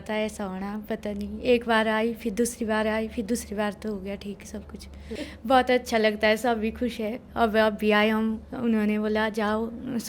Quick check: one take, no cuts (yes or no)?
no